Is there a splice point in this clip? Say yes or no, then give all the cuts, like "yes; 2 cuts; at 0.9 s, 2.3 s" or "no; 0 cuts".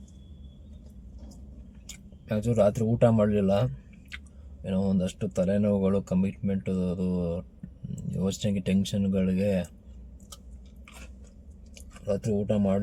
no; 0 cuts